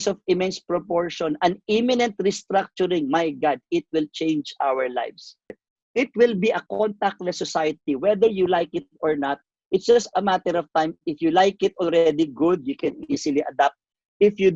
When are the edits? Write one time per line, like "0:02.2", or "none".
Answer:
0:05.7